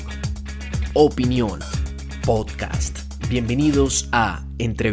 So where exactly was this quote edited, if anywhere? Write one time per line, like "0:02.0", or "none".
none